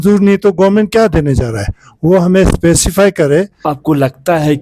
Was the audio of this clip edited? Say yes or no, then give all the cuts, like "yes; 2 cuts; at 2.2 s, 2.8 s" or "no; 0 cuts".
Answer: yes; 1 cut; at 3.6 s